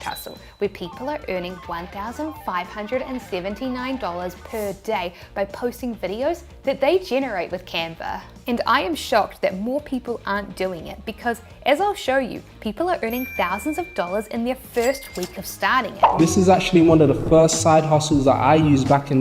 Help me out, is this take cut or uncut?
cut